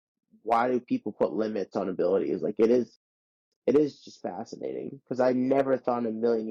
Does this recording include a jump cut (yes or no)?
no